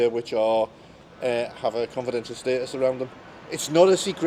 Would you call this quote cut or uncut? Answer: uncut